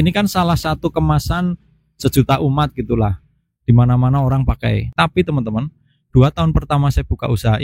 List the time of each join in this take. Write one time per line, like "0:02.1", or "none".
0:04.9